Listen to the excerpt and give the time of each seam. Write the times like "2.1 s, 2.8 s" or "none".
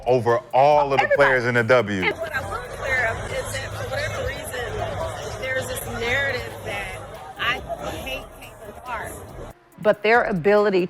2.2 s, 9.5 s